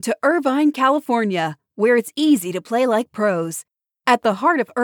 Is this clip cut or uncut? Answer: uncut